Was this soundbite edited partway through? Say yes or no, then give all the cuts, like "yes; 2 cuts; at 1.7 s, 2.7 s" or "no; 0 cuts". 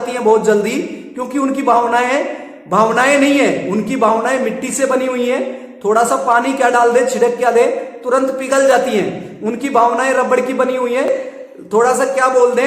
yes; 1 cut; at 11.1 s